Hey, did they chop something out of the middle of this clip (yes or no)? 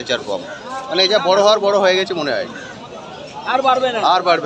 no